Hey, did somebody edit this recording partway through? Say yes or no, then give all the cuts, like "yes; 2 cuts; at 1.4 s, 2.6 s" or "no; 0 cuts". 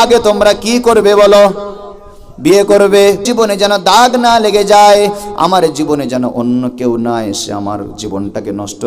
yes; 1 cut; at 3.2 s